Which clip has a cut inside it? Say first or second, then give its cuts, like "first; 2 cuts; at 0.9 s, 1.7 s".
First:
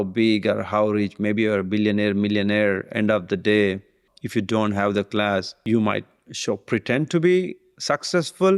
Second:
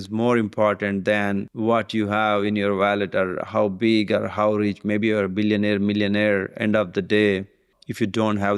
second; 1 cut; at 1.5 s